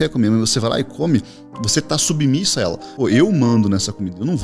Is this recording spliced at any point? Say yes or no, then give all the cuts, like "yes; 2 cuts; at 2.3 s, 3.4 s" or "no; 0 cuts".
yes; 1 cut; at 2.9 s